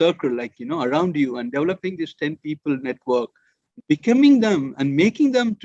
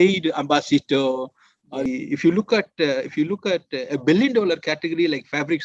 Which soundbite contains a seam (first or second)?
second